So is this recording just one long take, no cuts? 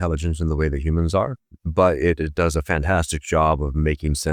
yes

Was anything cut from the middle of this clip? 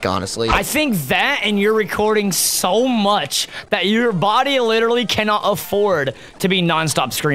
no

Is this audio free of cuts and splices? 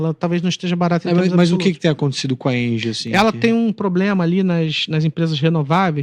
yes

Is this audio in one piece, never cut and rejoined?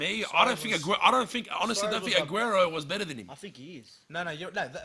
yes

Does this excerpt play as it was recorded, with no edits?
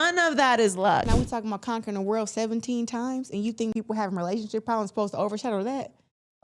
no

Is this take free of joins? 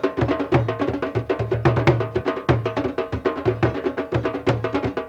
yes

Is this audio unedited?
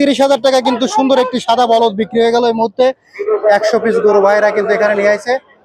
no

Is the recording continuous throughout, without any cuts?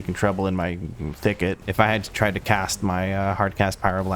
no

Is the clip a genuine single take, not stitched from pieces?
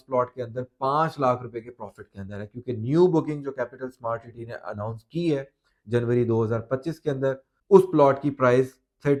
yes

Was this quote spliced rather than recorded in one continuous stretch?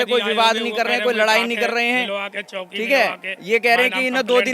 no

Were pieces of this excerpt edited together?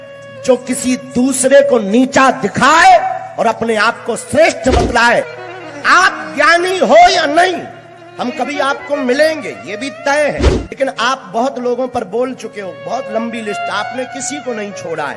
yes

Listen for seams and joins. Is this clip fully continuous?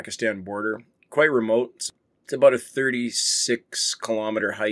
no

